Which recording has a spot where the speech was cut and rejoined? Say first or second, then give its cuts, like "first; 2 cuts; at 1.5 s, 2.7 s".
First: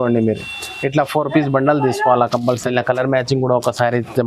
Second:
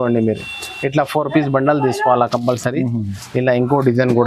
first; 1 cut; at 2.6 s